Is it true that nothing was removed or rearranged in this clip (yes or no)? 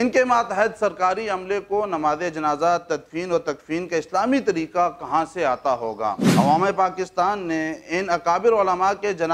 no